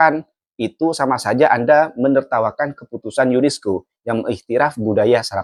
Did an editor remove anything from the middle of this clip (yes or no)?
no